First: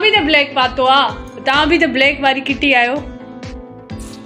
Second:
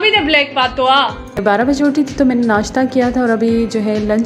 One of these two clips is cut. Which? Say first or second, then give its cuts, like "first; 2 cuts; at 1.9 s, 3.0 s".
second; 1 cut; at 1.6 s